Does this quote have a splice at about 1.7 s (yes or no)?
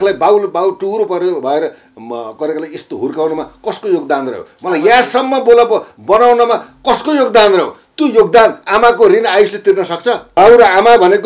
no